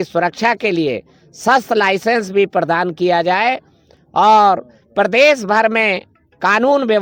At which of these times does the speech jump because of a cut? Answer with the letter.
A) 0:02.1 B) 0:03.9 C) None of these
C